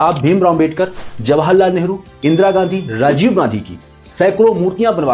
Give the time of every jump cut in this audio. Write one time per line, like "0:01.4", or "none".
none